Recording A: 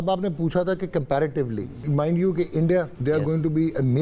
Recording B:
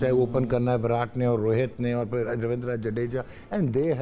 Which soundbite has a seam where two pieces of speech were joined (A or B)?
A